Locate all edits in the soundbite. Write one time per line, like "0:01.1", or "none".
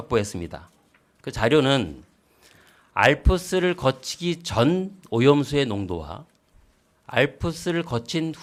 none